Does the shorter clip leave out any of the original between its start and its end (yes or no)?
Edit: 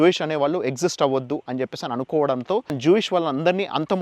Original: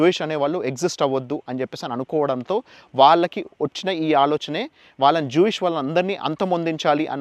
yes